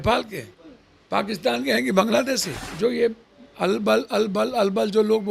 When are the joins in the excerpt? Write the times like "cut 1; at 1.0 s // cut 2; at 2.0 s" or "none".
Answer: cut 1; at 2.6 s